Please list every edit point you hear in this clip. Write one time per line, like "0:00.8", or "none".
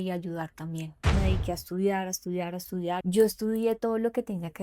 0:01.1
0:03.0